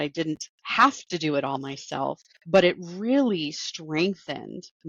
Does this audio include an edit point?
yes; 1 cut; at 2.3 s

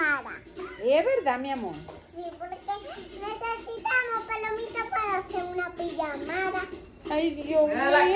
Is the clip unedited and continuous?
yes; 0 cuts

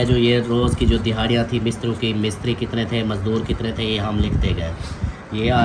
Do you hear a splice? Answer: no; 0 cuts

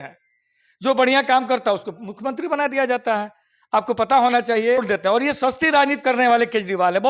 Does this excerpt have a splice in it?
yes; 1 cut; at 4.8 s

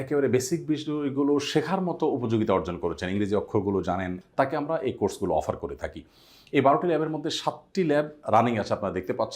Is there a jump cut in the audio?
yes; 1 cut; at 4.2 s

